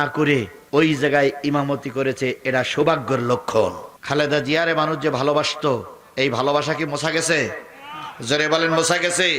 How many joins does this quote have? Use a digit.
1